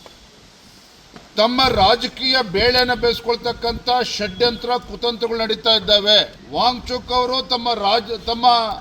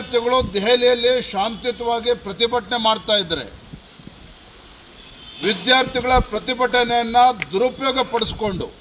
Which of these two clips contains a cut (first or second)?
first